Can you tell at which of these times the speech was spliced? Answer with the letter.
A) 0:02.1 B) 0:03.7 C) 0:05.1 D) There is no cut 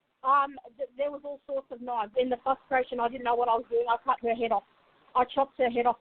A